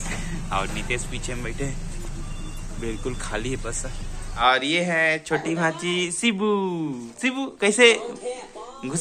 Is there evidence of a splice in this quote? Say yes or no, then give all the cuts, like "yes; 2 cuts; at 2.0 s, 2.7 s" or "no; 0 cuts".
yes; 1 cut; at 4.3 s